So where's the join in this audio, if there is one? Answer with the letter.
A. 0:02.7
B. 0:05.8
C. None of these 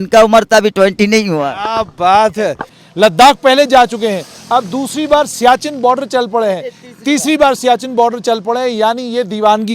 A